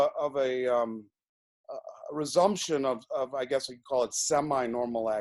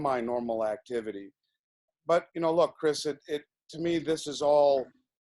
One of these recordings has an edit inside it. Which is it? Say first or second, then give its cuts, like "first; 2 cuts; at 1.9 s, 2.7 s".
second; 1 cut; at 1.9 s